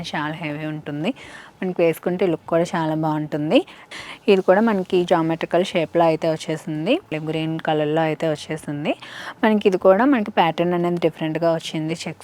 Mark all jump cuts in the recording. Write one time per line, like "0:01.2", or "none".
0:03.8
0:07.1